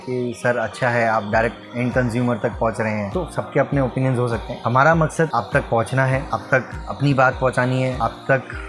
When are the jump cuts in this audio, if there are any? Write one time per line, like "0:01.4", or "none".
0:03.1
0:04.5
0:05.3
0:06.2
0:08.0